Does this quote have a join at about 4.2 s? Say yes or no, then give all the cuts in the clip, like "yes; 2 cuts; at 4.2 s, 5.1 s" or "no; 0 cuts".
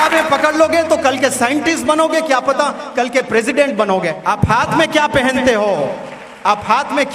yes; 1 cut; at 4.2 s